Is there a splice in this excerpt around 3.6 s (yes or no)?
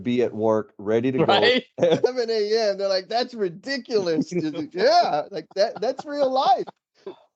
no